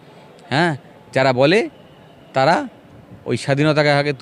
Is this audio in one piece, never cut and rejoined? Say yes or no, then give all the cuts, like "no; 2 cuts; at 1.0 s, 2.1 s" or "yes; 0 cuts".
yes; 0 cuts